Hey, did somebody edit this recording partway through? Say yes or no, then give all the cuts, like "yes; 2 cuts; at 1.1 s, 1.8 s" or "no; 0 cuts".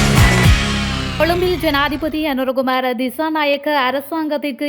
yes; 1 cut; at 1.1 s